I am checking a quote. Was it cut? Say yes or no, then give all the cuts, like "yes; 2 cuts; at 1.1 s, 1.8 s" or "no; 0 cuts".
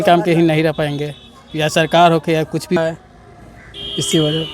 yes; 1 cut; at 2.8 s